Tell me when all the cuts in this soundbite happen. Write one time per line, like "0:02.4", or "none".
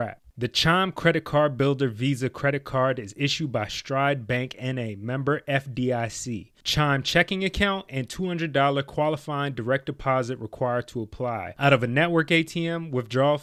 none